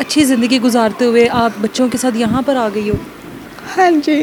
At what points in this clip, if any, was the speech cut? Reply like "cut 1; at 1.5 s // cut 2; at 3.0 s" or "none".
none